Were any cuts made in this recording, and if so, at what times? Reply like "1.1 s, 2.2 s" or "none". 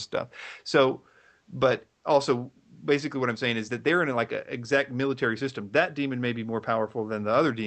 6.5 s